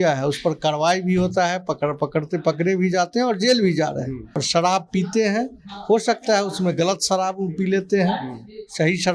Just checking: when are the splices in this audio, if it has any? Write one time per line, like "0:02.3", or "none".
0:04.4